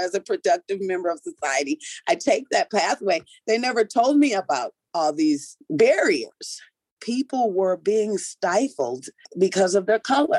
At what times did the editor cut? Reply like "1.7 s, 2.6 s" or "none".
7.0 s, 9.3 s